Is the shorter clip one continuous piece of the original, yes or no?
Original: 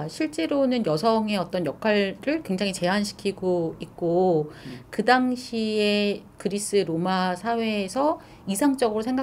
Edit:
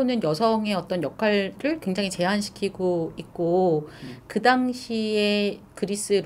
yes